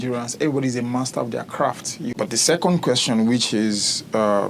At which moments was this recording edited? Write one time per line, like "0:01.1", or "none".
0:02.1